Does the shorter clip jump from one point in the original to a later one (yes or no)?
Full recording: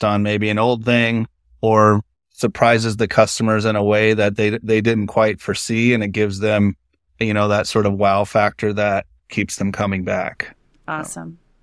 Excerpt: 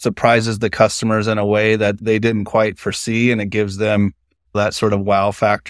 yes